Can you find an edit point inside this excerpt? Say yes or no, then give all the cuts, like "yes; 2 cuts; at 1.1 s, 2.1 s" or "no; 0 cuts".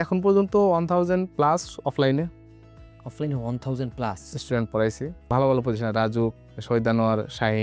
yes; 2 cuts; at 5.2 s, 6.5 s